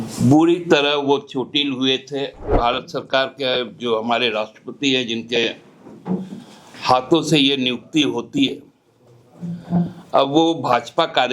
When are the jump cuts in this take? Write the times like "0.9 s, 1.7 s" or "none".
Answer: 2.5 s